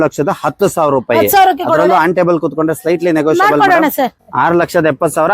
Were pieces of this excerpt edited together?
yes; 1 cut; at 4.2 s

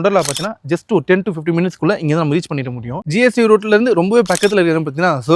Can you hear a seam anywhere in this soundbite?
yes; 1 cut; at 3.0 s

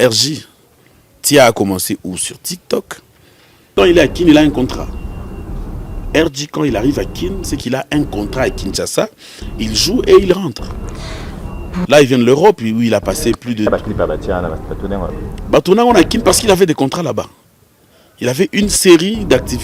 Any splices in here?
yes; 1 cut; at 3.7 s

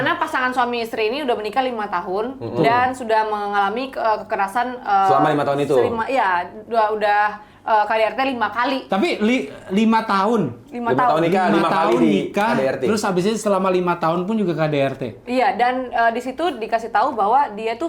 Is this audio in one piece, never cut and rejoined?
yes; 0 cuts

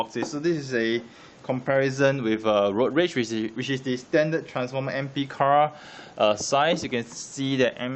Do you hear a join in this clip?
no; 0 cuts

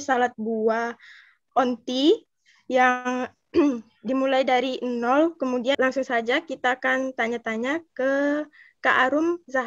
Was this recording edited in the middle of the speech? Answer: yes; 1 cut; at 5.8 s

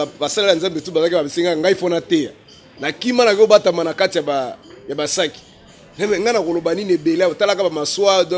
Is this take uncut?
yes; 0 cuts

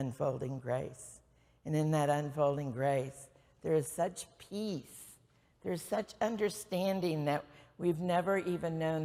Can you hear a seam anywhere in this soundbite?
no; 0 cuts

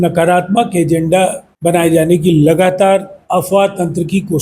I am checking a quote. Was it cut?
yes; 2 cuts; at 1.5 s, 3.2 s

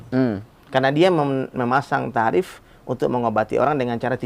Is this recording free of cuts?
yes; 0 cuts

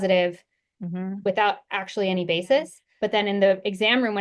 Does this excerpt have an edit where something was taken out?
yes; 1 cut; at 2.8 s

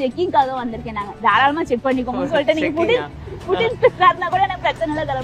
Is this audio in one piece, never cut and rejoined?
yes; 0 cuts

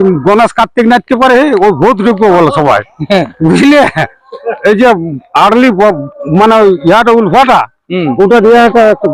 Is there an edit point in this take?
no; 0 cuts

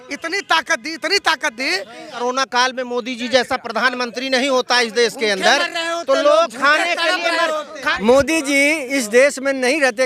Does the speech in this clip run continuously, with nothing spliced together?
no; 2 cuts; at 2.2 s, 7.8 s

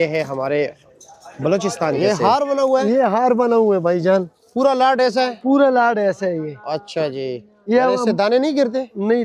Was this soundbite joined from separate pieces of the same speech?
yes; 1 cut; at 2.0 s

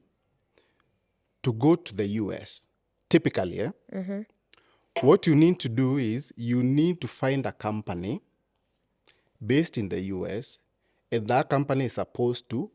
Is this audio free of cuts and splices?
yes; 0 cuts

